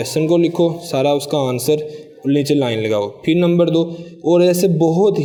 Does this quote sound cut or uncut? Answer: uncut